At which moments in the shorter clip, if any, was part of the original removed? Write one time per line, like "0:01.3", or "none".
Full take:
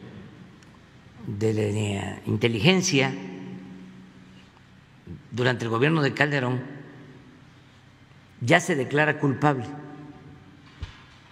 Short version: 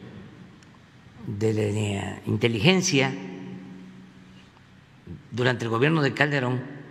none

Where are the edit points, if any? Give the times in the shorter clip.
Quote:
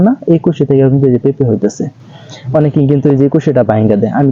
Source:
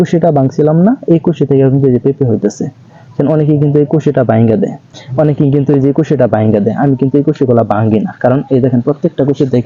0:02.2

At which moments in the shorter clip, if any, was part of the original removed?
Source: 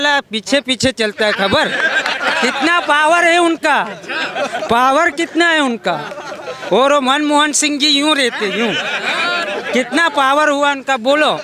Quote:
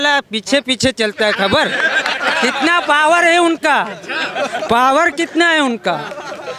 none

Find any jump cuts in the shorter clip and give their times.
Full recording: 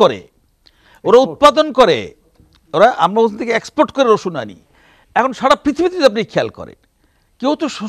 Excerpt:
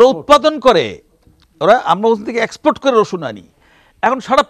none

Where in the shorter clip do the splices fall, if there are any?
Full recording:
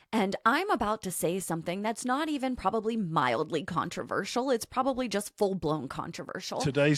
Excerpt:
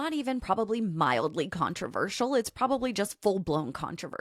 none

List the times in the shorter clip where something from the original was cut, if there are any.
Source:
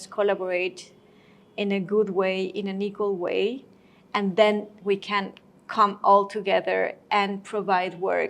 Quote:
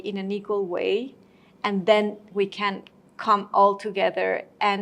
none

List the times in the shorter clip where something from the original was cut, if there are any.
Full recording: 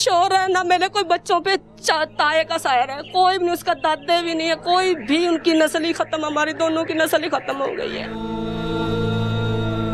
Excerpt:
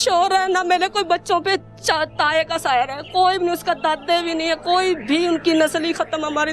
none

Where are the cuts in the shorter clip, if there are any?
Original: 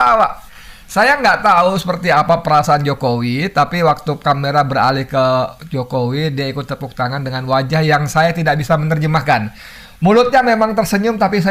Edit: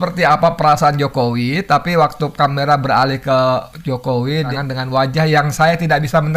0:04.5

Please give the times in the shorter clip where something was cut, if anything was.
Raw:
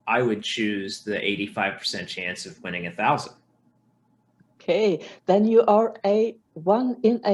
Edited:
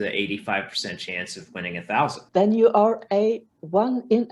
0:02.2

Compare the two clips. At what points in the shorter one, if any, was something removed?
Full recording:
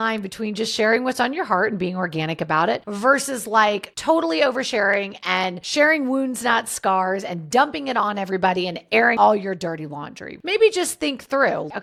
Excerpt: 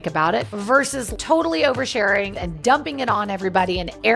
0:01.1
0:02.4

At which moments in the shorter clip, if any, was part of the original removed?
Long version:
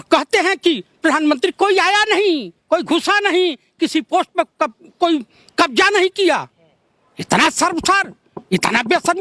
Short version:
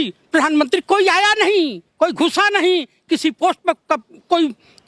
none

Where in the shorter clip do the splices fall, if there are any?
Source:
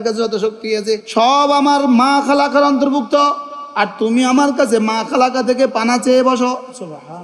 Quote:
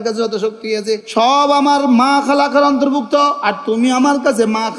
0:03.5

